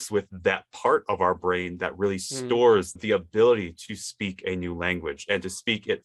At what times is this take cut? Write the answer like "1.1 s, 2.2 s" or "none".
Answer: none